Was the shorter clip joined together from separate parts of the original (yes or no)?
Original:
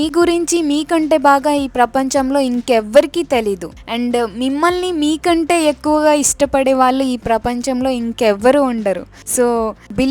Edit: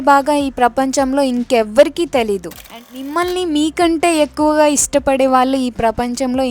yes